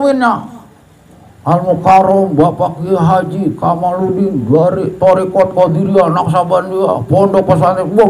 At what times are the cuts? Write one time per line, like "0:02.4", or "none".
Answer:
none